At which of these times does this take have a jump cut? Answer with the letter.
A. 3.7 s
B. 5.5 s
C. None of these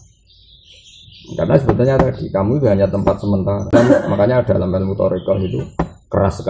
A